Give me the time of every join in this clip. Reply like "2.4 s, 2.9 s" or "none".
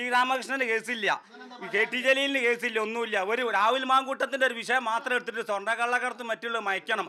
none